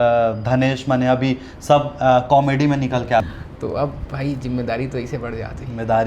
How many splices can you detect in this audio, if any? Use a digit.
1